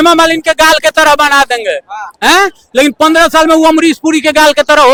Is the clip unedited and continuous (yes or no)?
yes